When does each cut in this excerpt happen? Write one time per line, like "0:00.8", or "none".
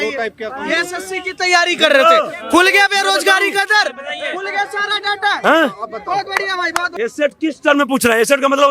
0:06.8